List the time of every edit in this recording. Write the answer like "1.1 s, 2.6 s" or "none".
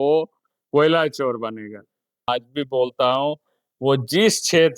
2.3 s